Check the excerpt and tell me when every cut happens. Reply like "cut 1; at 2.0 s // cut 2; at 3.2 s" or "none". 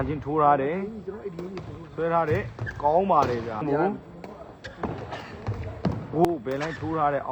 cut 1; at 3.6 s // cut 2; at 6.2 s